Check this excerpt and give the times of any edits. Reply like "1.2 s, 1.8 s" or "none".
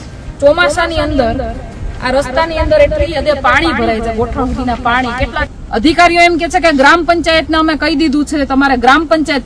5.5 s